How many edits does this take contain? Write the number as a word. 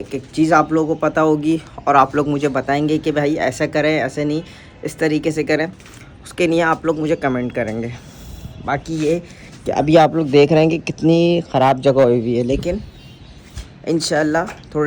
zero